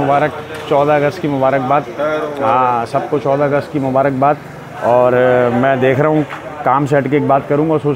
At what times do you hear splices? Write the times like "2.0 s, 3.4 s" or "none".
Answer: none